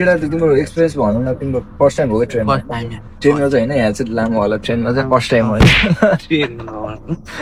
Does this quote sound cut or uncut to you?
uncut